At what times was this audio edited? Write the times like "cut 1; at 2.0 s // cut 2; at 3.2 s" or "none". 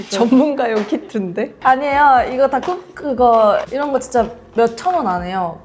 cut 1; at 3.7 s